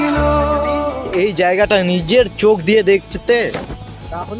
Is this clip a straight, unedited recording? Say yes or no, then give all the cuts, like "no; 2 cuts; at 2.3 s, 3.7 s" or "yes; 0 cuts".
no; 1 cut; at 0.9 s